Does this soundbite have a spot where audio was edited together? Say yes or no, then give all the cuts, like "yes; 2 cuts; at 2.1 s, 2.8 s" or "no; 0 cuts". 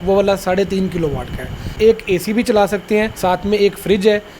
yes; 2 cuts; at 1.7 s, 3.1 s